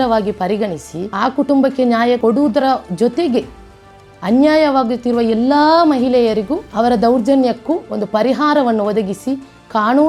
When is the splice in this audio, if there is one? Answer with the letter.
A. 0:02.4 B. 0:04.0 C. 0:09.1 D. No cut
D